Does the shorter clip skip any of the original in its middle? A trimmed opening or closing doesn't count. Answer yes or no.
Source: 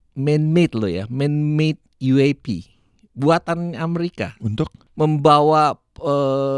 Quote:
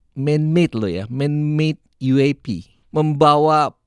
yes